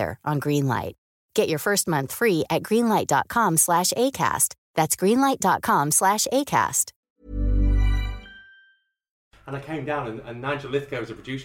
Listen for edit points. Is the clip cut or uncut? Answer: cut